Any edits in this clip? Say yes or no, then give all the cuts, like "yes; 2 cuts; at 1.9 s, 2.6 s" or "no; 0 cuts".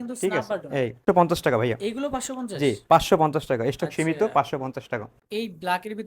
yes; 2 cuts; at 1.0 s, 5.2 s